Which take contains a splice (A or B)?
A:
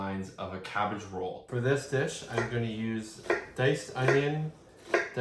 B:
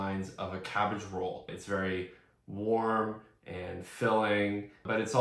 A